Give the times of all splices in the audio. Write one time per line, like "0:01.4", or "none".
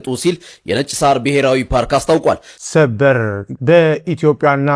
0:02.5